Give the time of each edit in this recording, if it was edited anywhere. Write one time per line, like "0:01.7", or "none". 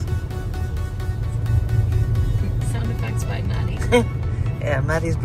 0:01.1